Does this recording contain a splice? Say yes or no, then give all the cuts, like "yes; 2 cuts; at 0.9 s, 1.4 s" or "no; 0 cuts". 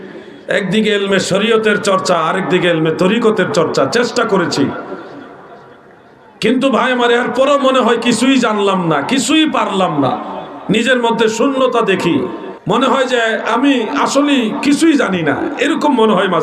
yes; 1 cut; at 12.5 s